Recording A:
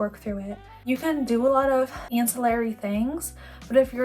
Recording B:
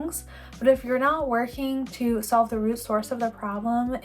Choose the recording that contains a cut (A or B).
A